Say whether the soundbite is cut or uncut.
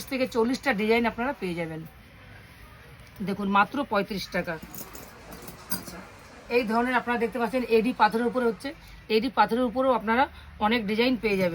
uncut